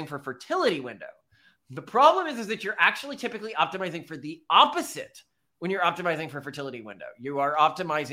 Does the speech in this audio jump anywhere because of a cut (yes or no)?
no